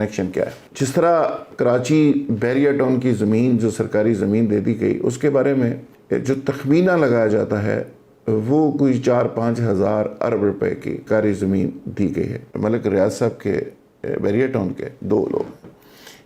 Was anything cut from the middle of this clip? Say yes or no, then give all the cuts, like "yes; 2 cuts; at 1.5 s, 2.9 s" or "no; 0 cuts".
yes; 3 cuts; at 5.9 s, 11.0 s, 12.4 s